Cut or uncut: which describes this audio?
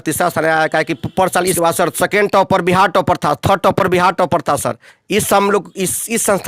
cut